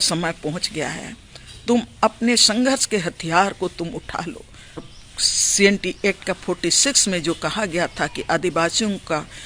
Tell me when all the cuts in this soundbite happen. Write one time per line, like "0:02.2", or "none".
0:04.9